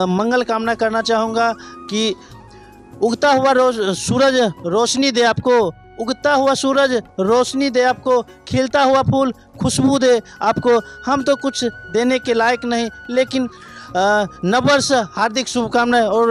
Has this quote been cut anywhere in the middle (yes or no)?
no